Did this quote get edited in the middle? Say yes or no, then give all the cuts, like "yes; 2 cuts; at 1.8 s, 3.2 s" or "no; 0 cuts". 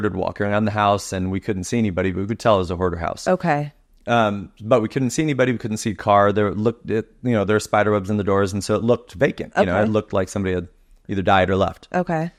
no; 0 cuts